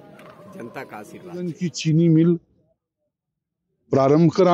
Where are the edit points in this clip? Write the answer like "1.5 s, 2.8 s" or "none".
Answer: 1.5 s